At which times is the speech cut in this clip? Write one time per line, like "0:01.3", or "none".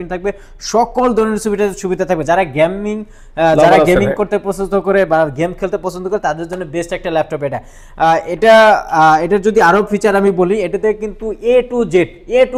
none